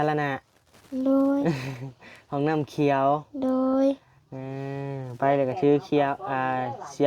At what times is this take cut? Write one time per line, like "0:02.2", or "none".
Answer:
none